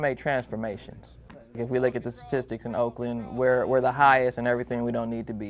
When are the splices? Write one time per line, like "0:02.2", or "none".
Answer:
0:01.6